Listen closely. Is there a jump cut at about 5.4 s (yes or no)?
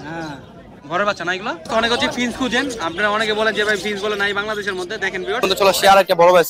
yes